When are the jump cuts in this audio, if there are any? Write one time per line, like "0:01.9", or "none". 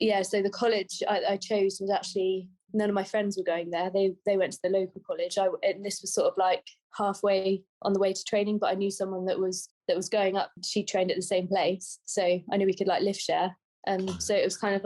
none